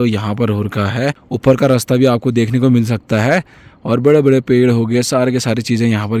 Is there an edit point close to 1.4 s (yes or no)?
yes